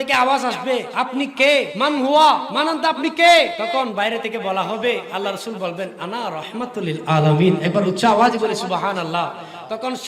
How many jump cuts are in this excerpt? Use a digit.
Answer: 4